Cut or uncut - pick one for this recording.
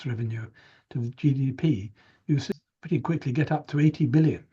cut